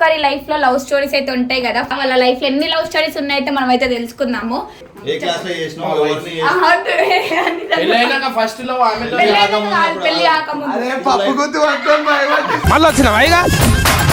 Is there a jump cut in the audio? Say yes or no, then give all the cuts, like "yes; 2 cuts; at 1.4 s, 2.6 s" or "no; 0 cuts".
yes; 2 cuts; at 1.9 s, 4.8 s